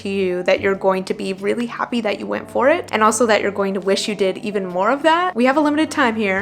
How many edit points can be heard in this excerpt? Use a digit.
1